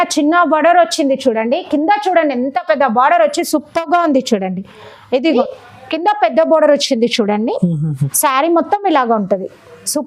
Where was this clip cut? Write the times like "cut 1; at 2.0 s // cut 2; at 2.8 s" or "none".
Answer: cut 1; at 5.4 s